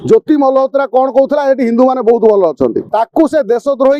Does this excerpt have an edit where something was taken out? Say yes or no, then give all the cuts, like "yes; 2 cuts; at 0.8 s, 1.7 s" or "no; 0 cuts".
yes; 1 cut; at 2.8 s